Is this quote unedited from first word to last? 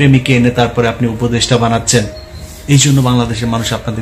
yes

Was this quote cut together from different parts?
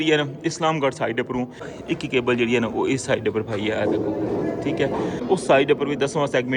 yes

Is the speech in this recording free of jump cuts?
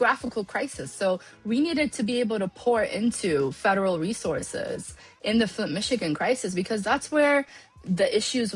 no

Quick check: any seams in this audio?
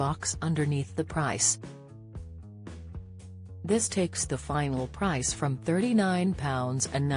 yes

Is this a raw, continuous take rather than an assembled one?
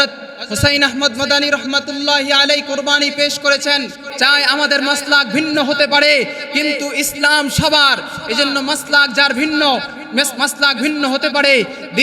no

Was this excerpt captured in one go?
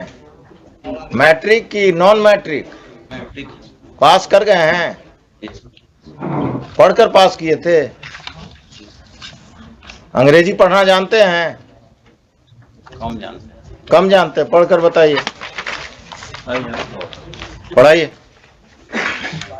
yes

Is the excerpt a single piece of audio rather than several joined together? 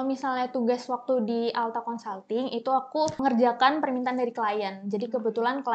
no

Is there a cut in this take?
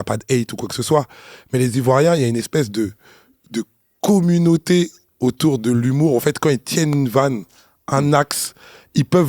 no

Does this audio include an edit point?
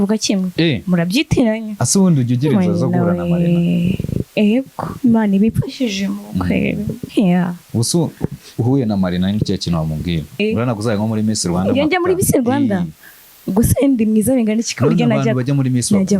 yes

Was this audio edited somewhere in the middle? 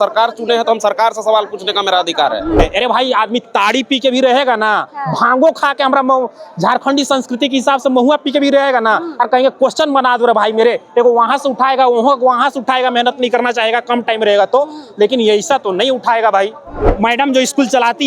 yes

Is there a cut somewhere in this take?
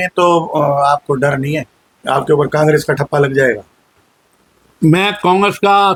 no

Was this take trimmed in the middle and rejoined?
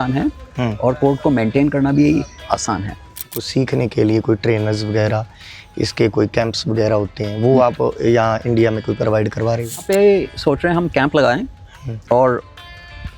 yes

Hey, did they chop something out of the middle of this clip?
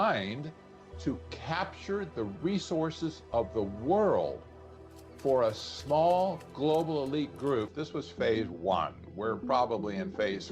yes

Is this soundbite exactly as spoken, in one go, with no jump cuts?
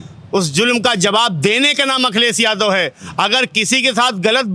yes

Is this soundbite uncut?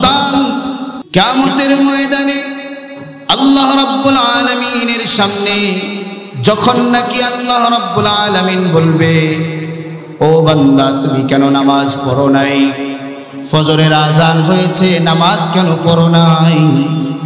no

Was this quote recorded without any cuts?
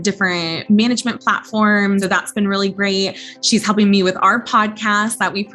no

